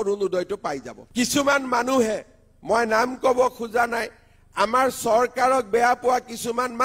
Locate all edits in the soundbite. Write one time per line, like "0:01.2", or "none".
0:01.0

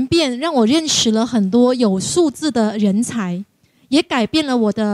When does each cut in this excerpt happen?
none

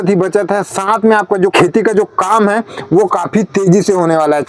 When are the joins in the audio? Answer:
0:01.5

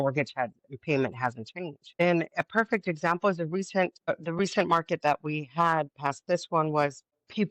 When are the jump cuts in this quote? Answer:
0:04.1

